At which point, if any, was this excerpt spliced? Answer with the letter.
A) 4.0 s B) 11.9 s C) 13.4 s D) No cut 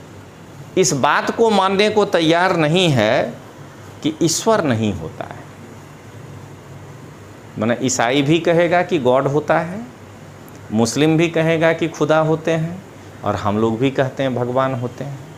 D